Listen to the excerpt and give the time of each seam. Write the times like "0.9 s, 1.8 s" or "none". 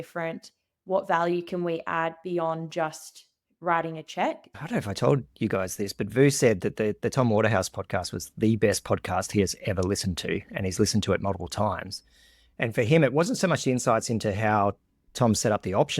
4.6 s